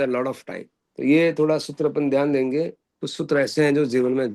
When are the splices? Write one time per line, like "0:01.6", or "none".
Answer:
none